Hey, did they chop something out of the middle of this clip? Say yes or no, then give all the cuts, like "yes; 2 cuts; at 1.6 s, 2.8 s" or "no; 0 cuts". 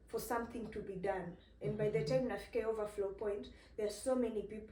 no; 0 cuts